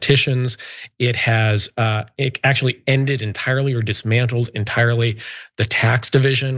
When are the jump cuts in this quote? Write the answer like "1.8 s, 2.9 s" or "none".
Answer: none